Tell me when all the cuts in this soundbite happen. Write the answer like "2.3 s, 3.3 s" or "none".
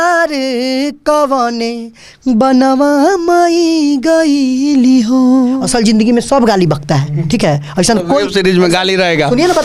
5.5 s